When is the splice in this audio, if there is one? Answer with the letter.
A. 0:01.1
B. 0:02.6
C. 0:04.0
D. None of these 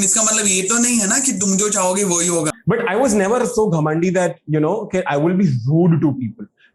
B